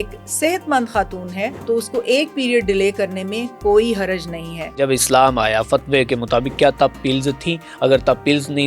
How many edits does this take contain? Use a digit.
2